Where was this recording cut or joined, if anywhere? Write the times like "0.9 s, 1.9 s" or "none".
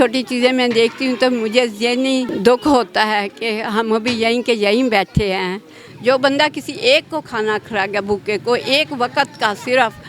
2.3 s, 5.9 s